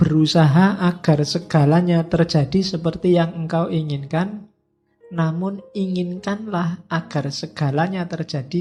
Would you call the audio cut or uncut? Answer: uncut